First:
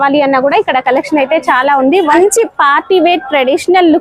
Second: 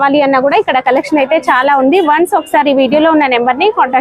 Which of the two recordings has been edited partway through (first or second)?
first